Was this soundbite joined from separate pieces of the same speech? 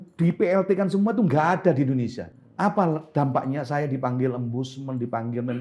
yes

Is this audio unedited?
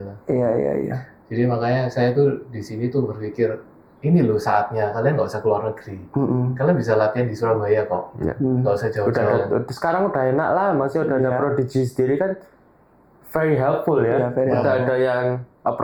yes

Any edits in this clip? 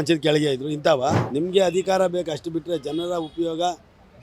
yes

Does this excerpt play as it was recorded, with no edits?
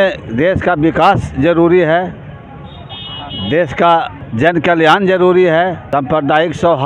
no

